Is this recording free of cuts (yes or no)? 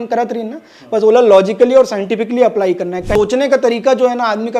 no